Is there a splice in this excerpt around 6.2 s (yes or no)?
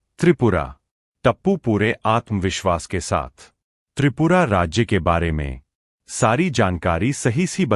no